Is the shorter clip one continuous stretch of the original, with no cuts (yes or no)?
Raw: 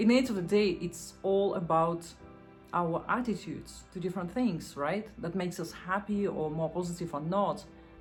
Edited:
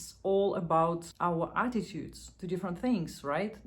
no